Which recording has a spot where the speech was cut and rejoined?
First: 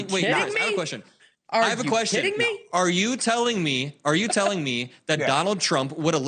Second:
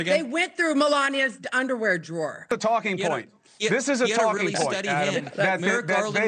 second; 1 cut; at 2.5 s

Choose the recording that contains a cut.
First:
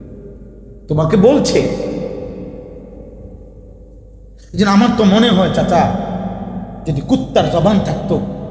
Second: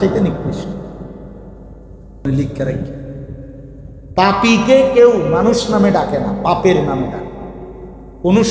second; 1 cut; at 2.2 s

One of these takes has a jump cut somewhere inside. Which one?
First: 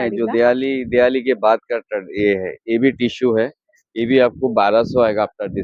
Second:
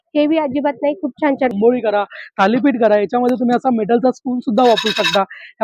second; 1 cut; at 1.5 s

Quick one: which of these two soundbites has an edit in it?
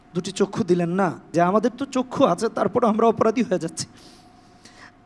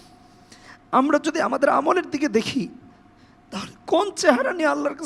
first; 1 cut; at 1.3 s

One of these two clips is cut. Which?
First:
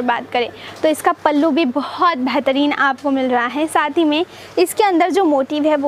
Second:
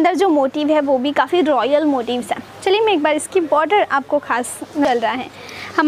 second; 1 cut; at 4.8 s

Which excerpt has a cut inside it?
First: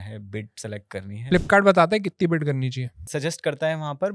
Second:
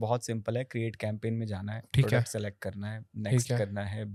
first; 2 cuts; at 1.3 s, 3.1 s

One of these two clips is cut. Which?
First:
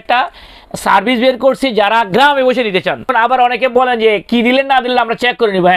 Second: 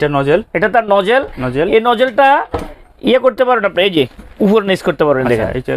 first; 1 cut; at 3.0 s

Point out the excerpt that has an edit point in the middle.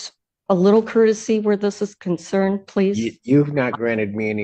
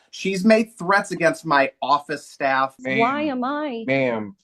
second; 1 cut; at 2.8 s

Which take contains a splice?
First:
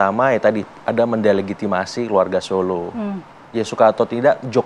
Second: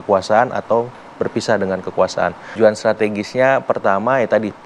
second; 1 cut; at 2.5 s

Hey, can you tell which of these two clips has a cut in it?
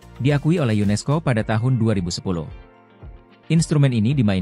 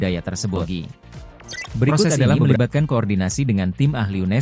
second; 1 cut; at 2.2 s

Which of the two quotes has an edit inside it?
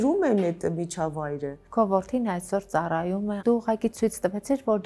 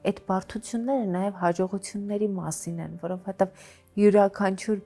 first; 2 cuts; at 1.6 s, 3.4 s

